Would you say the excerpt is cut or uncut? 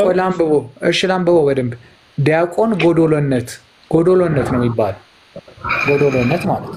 uncut